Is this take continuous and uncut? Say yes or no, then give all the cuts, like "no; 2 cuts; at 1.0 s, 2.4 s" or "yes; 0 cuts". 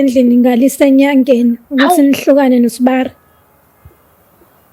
yes; 0 cuts